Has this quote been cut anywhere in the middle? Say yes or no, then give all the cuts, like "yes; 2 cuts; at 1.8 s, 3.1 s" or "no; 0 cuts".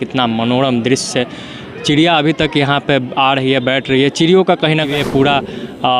yes; 1 cut; at 4.9 s